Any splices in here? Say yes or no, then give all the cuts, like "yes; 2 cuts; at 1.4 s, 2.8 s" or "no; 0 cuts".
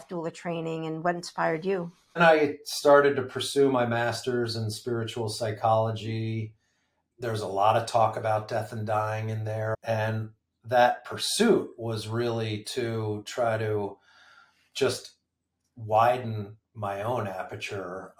yes; 1 cut; at 2.2 s